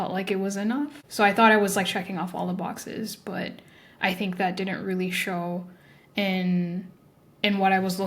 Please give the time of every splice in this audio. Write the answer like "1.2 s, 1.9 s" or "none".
1.0 s